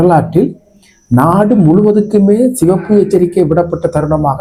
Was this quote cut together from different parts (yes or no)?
no